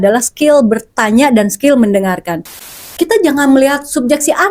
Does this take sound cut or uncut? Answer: cut